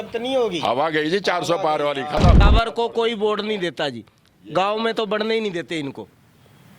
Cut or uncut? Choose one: cut